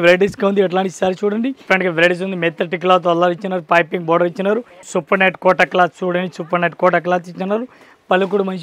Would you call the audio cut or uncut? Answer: cut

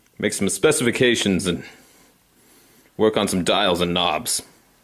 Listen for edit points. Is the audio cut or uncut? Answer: uncut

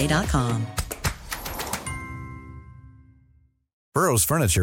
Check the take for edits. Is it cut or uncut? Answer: cut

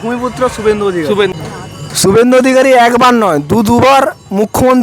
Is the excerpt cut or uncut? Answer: cut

